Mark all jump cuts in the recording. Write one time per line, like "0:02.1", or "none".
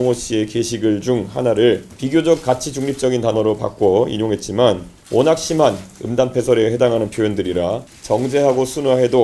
0:01.9
0:04.9
0:07.9